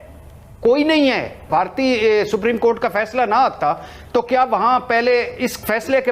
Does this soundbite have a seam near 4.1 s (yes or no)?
no